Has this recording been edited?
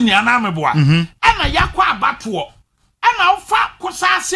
no; 0 cuts

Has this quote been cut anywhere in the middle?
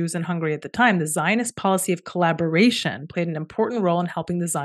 no; 0 cuts

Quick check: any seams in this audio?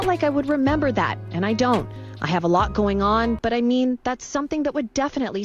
no; 0 cuts

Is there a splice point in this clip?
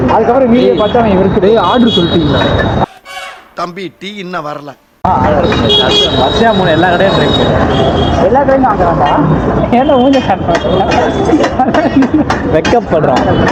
no; 0 cuts

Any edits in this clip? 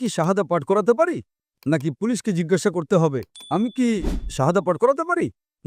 no; 0 cuts

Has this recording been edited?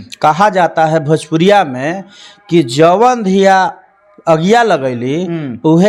no; 0 cuts

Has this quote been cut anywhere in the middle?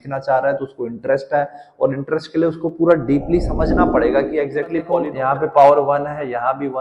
yes; 1 cut; at 5.1 s

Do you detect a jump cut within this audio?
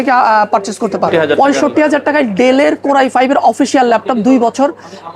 yes; 1 cut; at 1.3 s

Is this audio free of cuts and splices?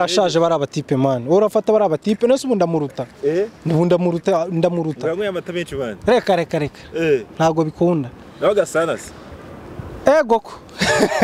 yes; 0 cuts

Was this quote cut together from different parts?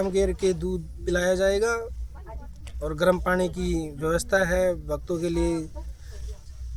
no; 0 cuts

